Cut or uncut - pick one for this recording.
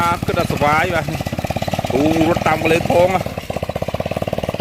uncut